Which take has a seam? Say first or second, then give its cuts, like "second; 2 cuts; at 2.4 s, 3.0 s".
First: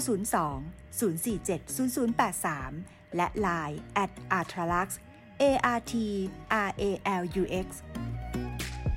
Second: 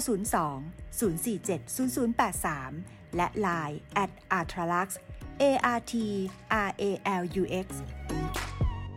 first; 1 cut; at 7.8 s